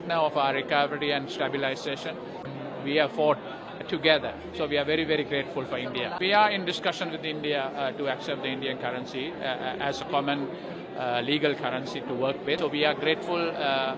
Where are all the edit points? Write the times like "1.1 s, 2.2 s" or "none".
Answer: 2.5 s, 6.1 s, 12.6 s